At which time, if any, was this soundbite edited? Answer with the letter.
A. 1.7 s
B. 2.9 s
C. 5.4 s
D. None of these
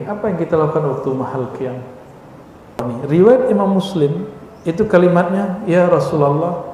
B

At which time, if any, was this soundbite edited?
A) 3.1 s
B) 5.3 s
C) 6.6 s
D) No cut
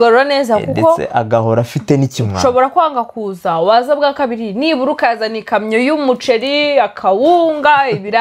D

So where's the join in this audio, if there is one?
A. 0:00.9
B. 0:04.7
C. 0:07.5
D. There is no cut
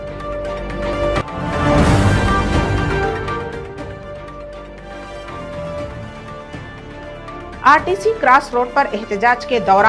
A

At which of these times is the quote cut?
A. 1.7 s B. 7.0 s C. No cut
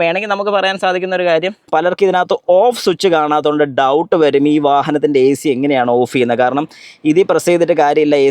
A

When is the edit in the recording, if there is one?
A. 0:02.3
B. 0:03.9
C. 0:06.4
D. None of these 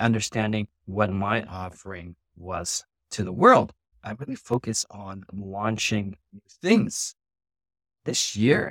B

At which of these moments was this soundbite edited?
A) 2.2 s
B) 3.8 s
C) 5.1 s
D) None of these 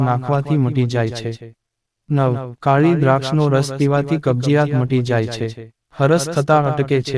A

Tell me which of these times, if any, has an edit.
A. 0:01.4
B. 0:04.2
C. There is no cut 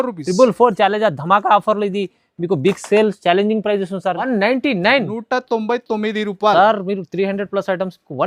B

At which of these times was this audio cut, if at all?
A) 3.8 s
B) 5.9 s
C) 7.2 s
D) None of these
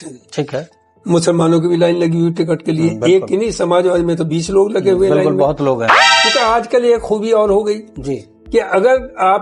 B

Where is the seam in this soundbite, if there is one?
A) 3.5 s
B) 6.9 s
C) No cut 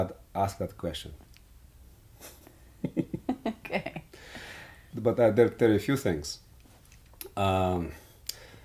A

